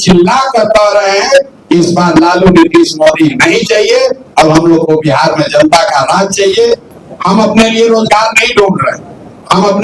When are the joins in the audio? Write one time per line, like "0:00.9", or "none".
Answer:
0:06.8